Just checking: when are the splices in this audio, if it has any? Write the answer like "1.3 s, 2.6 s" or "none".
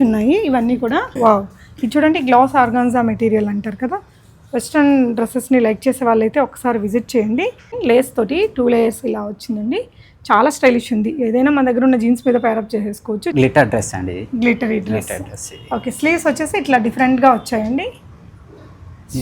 1.2 s, 7.7 s, 13.3 s